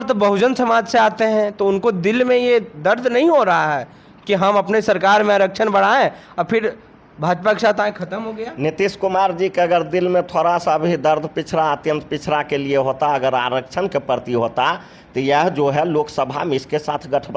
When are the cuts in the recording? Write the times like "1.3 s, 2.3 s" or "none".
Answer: none